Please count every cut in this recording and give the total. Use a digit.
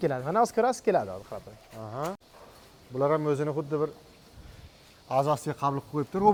0